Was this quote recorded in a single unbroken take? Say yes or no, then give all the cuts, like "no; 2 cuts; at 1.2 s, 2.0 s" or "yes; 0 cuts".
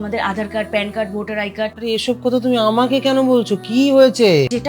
no; 1 cut; at 1.8 s